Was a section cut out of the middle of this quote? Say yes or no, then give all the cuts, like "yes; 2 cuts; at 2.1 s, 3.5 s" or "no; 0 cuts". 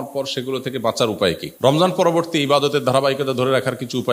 yes; 1 cut; at 1.7 s